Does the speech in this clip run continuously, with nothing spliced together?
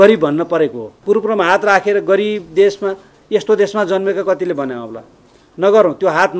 no; 1 cut; at 1.0 s

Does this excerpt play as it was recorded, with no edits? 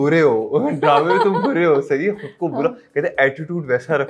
yes; 0 cuts

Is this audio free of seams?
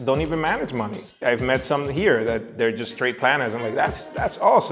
no; 1 cut; at 1.2 s

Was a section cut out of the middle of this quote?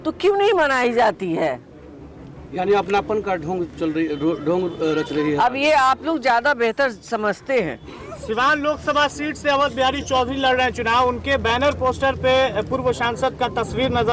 no; 0 cuts

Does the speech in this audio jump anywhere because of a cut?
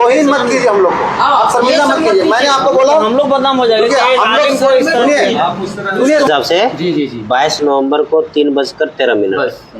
yes; 1 cut; at 6.3 s

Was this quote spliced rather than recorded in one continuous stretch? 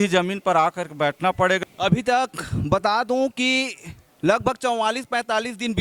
yes; 1 cut; at 1.6 s

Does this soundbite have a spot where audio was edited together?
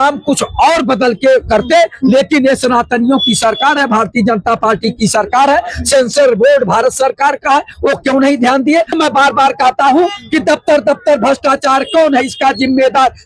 yes; 1 cut; at 8.9 s

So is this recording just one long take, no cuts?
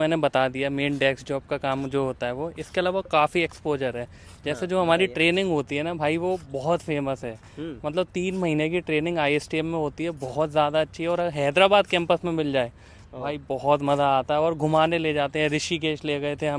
yes; 0 cuts

